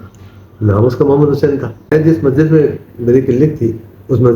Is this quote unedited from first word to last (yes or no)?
no